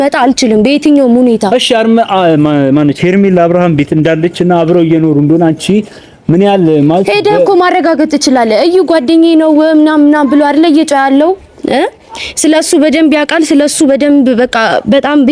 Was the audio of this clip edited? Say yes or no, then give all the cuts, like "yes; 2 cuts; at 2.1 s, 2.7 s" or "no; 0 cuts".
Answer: no; 0 cuts